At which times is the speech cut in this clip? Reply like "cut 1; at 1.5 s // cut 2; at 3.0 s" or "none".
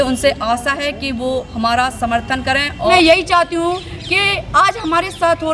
cut 1; at 2.9 s